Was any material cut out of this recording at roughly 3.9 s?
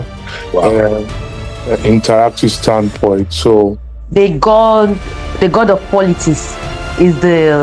yes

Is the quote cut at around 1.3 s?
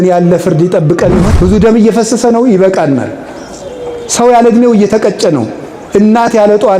yes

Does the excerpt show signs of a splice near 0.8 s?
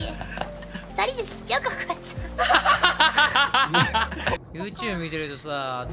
yes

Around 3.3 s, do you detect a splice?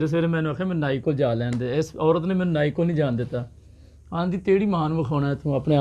no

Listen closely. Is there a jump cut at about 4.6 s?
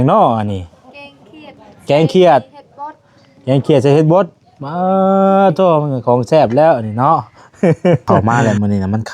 no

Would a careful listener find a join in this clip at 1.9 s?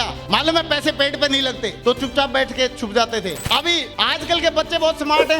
no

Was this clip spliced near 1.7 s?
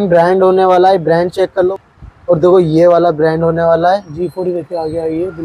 yes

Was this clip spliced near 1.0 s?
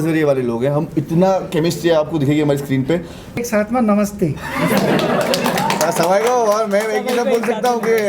no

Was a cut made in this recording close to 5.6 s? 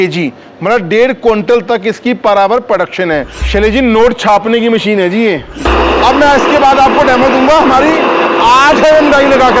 yes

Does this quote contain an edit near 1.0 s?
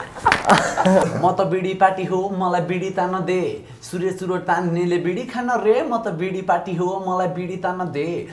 yes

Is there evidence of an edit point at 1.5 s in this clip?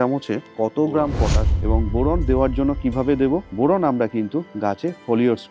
yes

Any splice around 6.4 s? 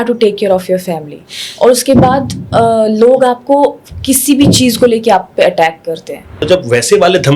yes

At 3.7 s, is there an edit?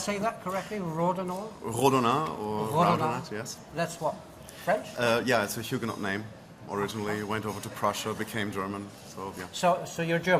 no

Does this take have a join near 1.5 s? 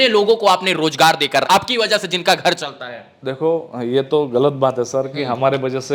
yes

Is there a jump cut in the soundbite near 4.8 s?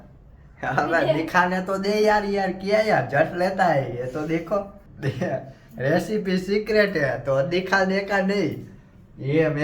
yes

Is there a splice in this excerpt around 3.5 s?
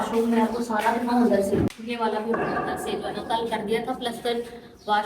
no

